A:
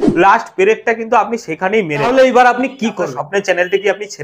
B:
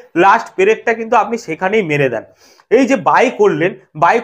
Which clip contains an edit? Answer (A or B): A